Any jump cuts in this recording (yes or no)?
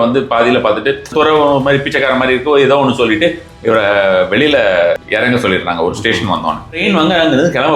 yes